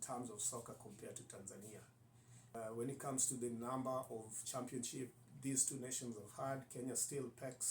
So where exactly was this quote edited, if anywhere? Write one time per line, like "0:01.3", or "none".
0:02.5